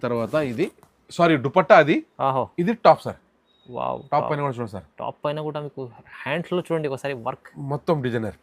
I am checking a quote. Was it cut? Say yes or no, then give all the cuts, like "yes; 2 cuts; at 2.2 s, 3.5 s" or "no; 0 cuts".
no; 0 cuts